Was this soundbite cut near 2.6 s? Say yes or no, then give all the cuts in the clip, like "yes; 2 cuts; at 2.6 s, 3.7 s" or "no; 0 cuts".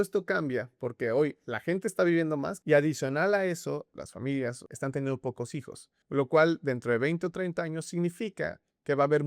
yes; 3 cuts; at 2.6 s, 3.9 s, 4.7 s